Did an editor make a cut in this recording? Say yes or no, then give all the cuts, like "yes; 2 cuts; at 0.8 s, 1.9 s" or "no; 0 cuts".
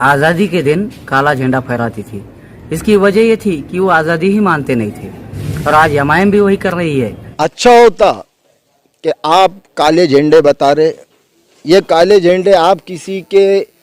yes; 1 cut; at 7.2 s